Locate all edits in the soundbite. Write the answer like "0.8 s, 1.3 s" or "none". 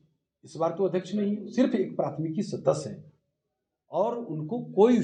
none